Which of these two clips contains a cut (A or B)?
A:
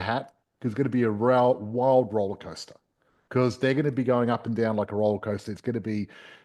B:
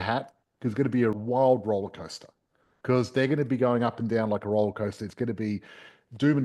B